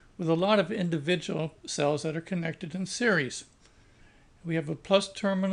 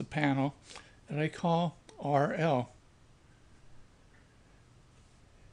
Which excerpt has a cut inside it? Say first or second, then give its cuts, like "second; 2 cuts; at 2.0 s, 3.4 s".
second; 1 cut; at 1.3 s